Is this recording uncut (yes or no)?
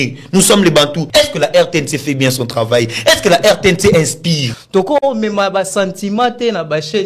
no